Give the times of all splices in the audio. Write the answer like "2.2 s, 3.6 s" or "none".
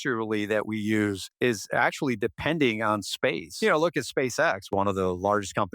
1.3 s, 3.5 s, 4.6 s